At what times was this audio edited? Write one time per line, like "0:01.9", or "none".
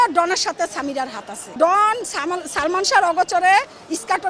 0:01.5